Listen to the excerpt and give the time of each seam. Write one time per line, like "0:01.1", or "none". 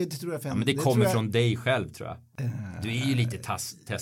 0:02.3